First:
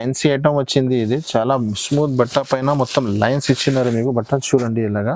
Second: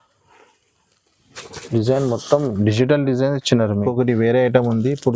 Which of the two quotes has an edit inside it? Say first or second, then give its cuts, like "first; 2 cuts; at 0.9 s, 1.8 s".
second; 1 cut; at 3.9 s